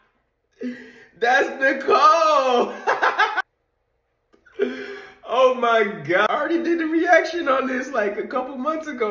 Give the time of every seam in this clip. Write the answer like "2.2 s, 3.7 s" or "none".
none